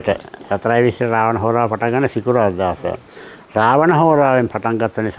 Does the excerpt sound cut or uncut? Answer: uncut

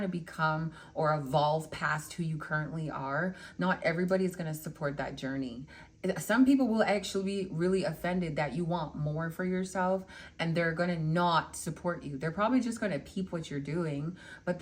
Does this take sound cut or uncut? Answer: uncut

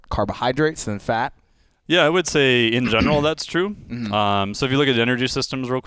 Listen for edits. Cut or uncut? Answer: uncut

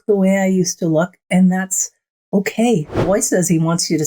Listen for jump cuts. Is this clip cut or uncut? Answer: cut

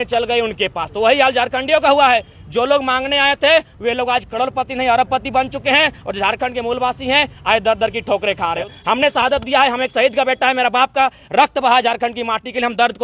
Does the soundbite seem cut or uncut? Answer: cut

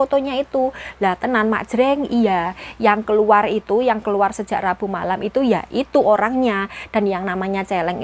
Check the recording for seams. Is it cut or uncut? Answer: uncut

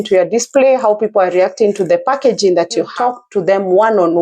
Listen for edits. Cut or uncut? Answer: cut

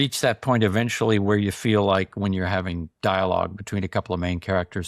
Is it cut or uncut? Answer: uncut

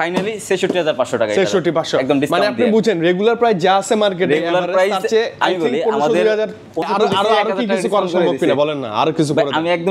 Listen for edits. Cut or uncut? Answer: cut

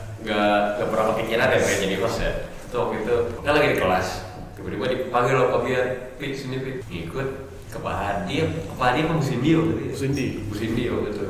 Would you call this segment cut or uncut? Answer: cut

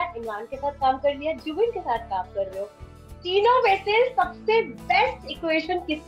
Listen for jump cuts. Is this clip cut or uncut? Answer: uncut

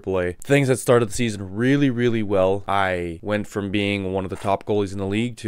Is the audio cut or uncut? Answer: cut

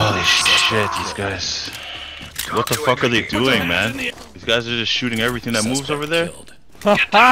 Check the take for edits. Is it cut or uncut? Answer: cut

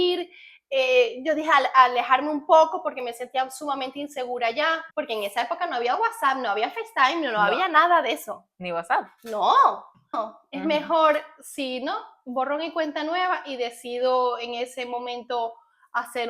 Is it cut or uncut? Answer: cut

